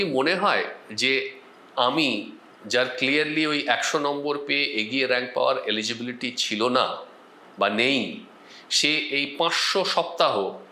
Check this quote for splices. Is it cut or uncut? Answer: uncut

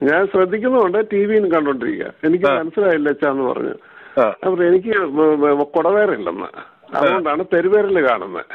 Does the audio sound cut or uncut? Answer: uncut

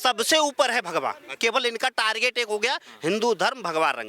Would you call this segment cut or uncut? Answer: cut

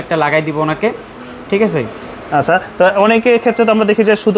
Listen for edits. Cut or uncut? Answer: uncut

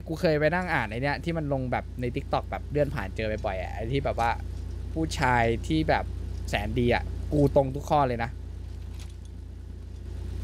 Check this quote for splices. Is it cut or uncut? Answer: uncut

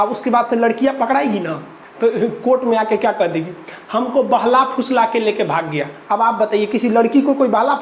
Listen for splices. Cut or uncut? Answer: uncut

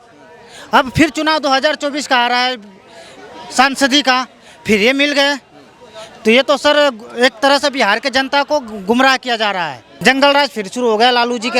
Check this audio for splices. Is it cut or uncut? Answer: cut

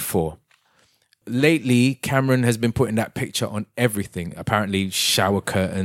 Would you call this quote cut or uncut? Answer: cut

